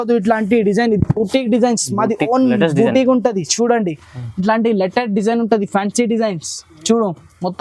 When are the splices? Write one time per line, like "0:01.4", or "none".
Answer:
none

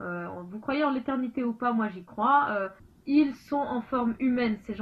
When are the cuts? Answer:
0:02.7

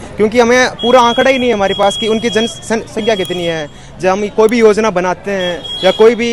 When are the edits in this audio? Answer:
none

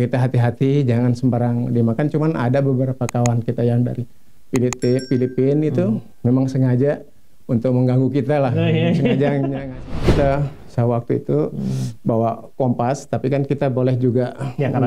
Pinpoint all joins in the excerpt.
0:09.8

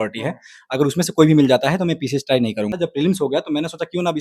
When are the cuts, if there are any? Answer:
0:02.7

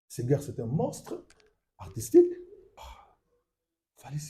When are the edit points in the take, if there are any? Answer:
0:02.8

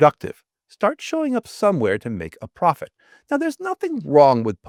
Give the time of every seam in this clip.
none

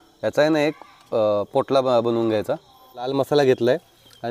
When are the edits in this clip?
0:03.1

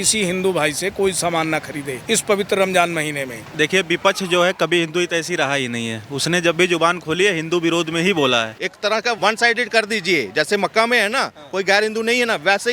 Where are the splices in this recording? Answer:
0:02.0
0:03.4
0:08.9

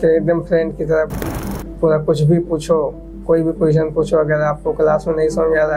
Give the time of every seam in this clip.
none

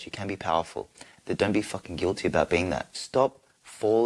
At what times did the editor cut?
0:03.0

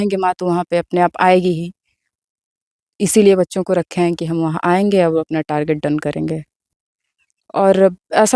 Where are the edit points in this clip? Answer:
none

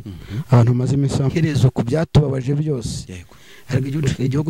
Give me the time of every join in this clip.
0:01.3

